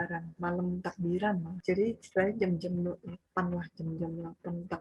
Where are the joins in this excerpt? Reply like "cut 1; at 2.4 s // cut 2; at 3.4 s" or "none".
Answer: none